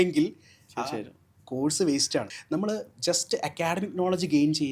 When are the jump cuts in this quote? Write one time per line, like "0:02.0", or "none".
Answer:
0:02.4